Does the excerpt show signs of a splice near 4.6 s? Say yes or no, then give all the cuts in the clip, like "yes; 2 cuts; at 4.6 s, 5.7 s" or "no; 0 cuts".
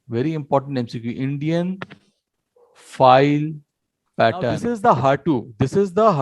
yes; 1 cut; at 4.6 s